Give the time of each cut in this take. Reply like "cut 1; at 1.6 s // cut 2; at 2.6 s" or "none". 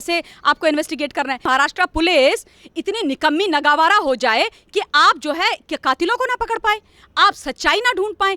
cut 1; at 1.5 s